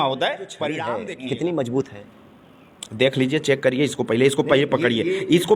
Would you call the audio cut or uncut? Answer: cut